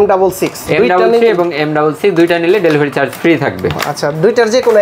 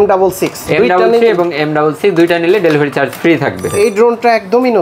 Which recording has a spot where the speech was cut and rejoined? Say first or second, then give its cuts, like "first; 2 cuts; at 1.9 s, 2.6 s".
second; 1 cut; at 3.6 s